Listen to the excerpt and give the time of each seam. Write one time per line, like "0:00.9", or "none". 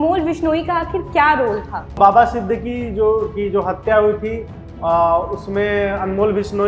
0:02.0